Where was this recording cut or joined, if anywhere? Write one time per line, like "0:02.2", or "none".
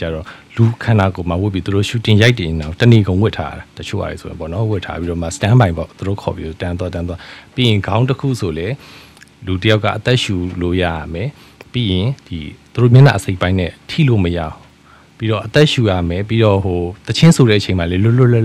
none